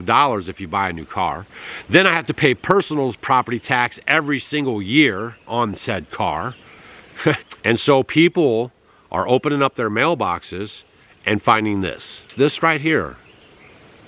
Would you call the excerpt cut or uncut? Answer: cut